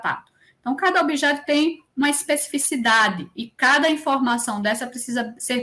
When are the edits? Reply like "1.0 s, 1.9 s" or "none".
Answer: none